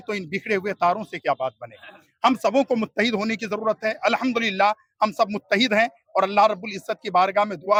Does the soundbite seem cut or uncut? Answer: uncut